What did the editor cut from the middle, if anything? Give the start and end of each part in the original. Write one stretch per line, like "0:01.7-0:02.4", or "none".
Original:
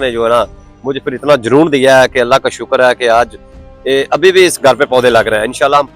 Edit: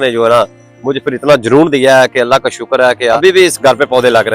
0:03.2-0:04.2